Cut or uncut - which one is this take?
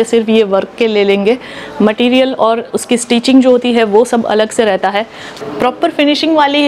cut